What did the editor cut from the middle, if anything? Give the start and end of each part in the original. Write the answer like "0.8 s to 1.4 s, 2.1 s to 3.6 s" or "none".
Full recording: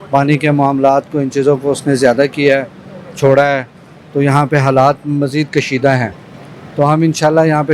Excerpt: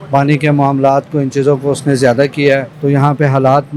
2.7 s to 4.0 s